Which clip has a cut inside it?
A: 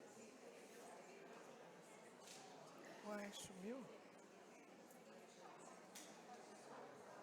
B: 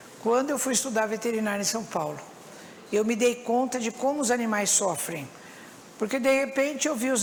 A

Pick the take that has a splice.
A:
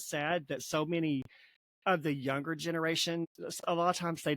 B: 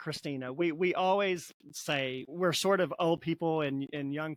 A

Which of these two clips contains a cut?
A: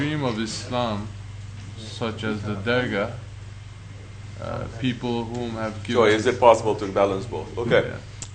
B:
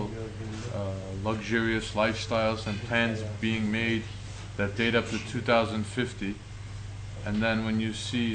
A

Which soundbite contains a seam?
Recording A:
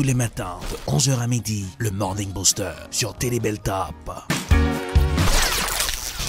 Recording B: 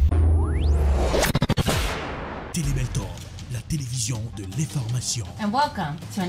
B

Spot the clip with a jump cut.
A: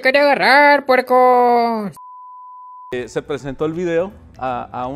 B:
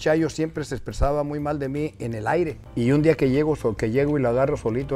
A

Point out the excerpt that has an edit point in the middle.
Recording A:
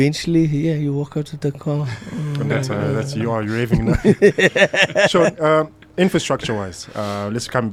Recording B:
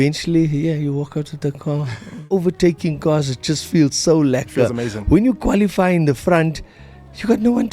B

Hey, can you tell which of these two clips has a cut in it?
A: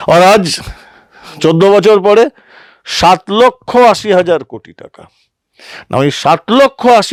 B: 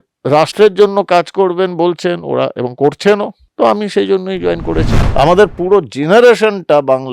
B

